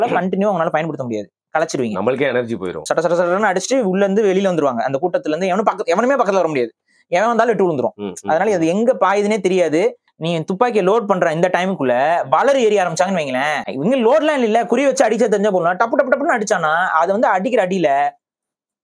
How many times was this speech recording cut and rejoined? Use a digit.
3